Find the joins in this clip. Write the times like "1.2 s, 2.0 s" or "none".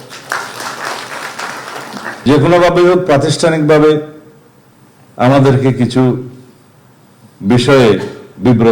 2.3 s